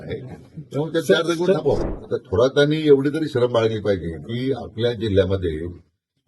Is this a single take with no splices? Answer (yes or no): no